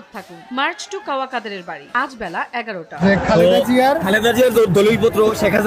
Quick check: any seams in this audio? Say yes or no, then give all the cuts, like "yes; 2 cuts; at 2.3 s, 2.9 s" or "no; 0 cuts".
yes; 1 cut; at 3.0 s